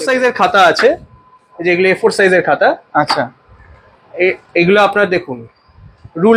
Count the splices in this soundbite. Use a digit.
0